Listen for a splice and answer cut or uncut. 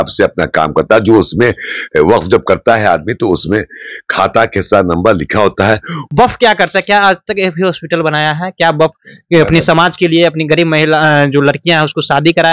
cut